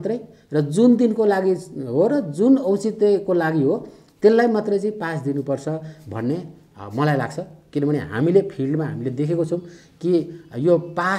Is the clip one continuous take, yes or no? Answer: yes